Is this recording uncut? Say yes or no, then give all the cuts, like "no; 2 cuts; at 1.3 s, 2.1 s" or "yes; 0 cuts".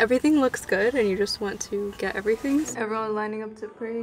no; 1 cut; at 2.7 s